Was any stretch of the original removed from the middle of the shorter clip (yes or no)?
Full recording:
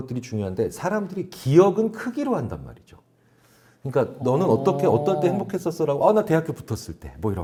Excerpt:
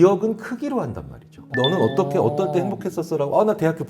yes